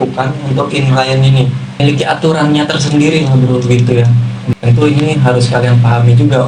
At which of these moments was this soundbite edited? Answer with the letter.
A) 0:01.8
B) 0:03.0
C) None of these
A